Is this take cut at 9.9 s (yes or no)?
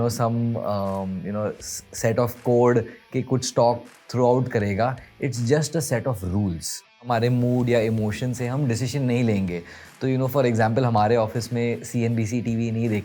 no